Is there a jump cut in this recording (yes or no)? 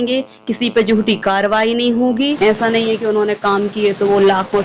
yes